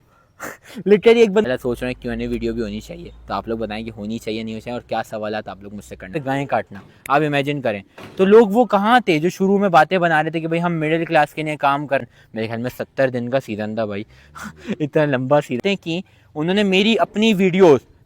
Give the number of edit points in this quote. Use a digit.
4